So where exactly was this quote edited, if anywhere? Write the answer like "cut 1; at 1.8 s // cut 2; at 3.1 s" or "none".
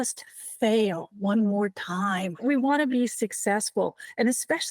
cut 1; at 2.4 s